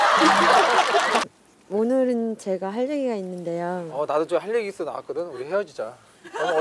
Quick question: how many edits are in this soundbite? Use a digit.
1